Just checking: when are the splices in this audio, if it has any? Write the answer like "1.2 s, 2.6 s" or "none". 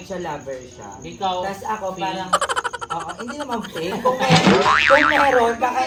none